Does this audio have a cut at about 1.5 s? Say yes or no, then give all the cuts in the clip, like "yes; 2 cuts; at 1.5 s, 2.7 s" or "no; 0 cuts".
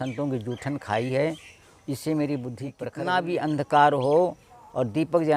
no; 1 cut; at 2.8 s